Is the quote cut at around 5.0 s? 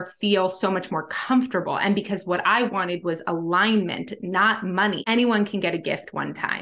yes; 1 cut; at 5.0 s

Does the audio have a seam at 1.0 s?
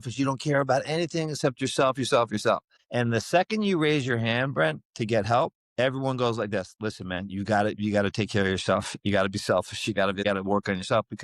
no; 3 cuts; at 2.8 s, 5.6 s, 10.2 s

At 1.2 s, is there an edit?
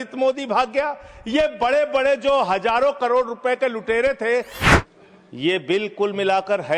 no; 1 cut; at 4.5 s

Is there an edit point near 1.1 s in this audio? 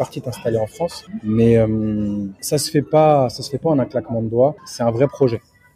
yes; 3 cuts; at 1.1 s, 2.3 s, 4.7 s

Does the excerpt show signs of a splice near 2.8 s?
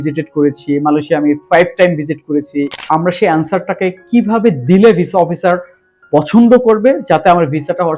yes; 1 cut; at 2.8 s

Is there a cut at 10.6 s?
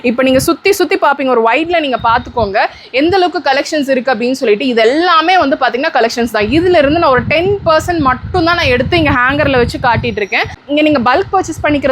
yes; 1 cut; at 10.6 s

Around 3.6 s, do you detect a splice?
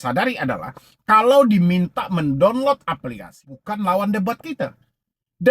yes; 1 cut; at 3.6 s

